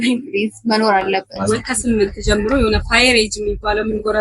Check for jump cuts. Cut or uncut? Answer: cut